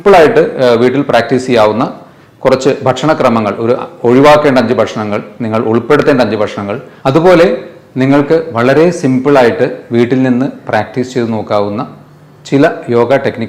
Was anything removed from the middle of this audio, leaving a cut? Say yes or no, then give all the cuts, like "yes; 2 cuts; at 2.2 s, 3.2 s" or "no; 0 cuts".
no; 0 cuts